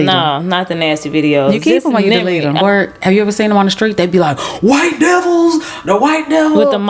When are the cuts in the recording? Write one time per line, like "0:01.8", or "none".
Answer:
0:02.6